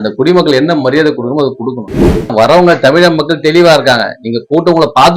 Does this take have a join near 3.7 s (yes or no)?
no